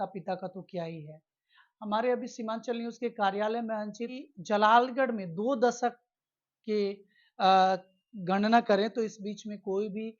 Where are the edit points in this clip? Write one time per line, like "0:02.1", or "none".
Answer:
0:04.2